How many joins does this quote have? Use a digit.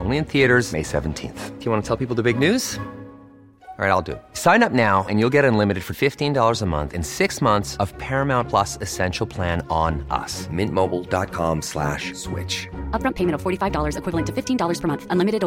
0